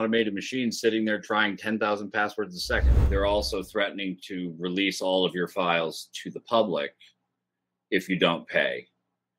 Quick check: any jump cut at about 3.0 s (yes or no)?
yes